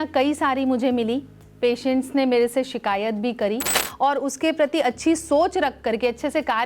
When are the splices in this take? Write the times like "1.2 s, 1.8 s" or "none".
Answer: 3.8 s